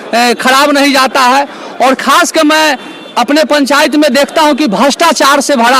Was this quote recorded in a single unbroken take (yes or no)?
yes